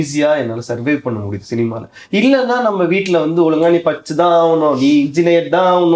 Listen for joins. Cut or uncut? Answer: uncut